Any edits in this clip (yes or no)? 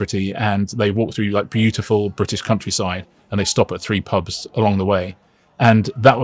no